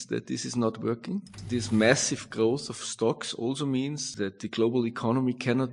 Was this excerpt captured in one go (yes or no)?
no